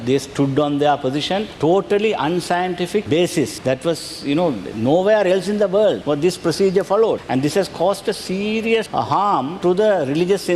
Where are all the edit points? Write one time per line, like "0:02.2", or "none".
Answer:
0:06.0
0:07.2
0:09.2